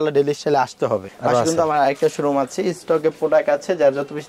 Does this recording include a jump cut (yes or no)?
yes